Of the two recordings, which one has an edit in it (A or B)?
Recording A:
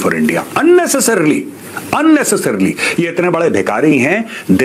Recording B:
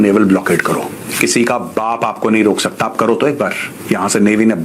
B